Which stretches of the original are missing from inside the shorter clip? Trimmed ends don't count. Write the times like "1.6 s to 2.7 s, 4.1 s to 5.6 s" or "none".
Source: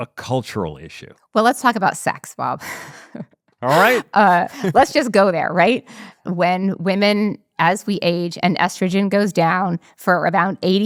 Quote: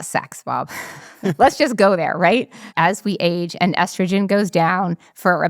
3.2 s to 4.7 s, 6.0 s to 7.4 s